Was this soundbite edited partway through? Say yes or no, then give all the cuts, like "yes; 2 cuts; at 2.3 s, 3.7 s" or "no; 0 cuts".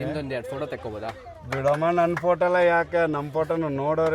no; 0 cuts